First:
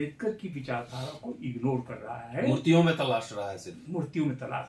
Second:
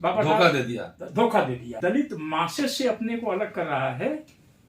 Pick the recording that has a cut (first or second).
second